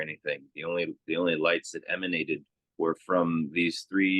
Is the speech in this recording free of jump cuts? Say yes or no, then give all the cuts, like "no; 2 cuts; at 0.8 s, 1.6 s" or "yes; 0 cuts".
no; 1 cut; at 2.6 s